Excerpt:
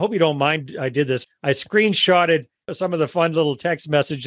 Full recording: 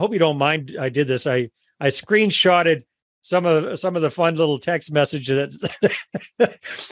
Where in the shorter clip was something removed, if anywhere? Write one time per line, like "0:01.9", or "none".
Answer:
0:01.2
0:02.7